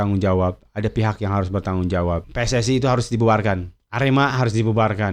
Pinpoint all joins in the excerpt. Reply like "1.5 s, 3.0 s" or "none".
2.2 s

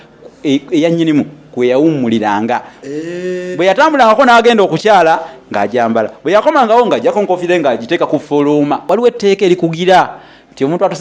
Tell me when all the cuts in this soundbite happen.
8.8 s

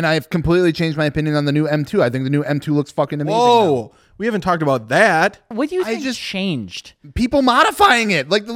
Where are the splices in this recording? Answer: 5.5 s

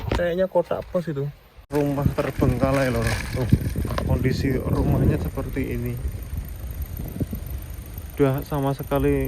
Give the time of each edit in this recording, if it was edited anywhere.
1.7 s

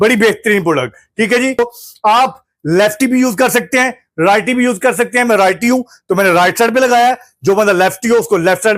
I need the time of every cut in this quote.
1.6 s

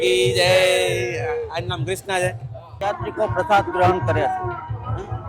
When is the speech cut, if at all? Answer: 2.9 s

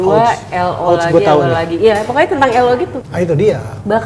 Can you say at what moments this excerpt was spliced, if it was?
3.0 s

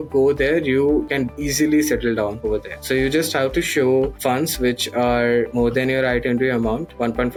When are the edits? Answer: none

